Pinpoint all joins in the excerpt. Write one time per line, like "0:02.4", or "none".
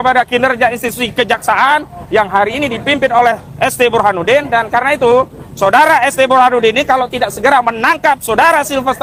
none